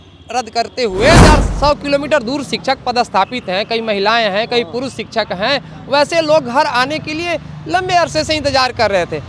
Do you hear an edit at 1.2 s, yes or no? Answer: yes